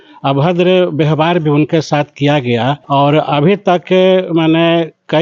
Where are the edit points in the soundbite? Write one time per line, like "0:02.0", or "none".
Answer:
0:02.8